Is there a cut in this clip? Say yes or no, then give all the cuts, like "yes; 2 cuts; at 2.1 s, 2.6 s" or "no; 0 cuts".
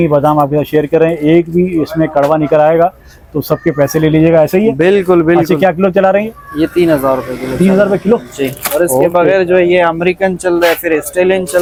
no; 0 cuts